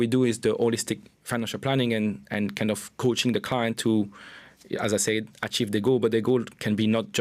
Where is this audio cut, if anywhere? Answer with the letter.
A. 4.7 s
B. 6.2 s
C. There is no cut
C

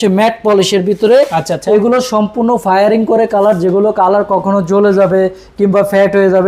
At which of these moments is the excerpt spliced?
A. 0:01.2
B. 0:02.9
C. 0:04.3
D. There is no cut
D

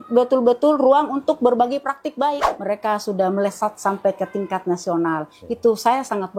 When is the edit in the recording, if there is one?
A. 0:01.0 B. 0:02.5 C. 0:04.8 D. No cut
B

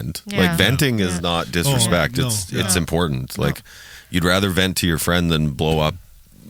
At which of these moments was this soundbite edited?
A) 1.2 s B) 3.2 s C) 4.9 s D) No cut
D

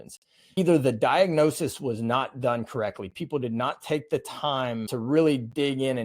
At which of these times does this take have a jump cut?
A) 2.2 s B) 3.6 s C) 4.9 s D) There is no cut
C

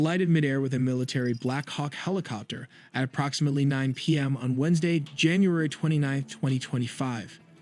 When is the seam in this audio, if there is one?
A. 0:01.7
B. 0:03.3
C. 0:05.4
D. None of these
C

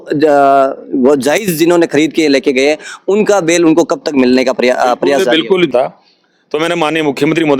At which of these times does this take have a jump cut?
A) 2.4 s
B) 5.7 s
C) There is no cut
B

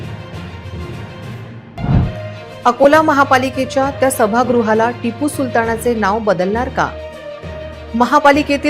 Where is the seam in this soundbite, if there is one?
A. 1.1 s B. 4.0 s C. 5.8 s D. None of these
A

